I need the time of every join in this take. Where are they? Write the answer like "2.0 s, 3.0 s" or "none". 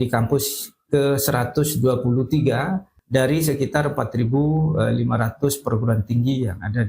2.9 s